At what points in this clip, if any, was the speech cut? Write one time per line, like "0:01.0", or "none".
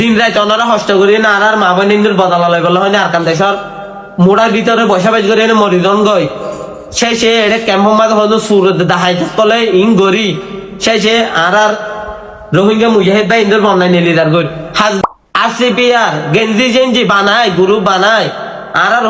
0:15.0